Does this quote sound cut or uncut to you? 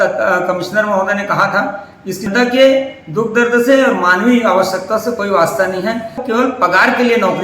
cut